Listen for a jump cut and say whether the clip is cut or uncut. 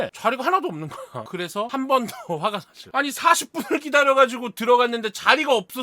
uncut